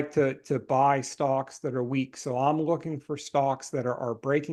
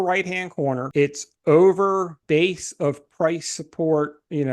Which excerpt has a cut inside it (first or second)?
second